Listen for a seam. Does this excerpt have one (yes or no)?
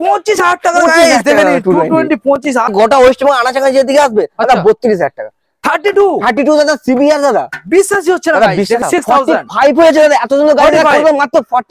yes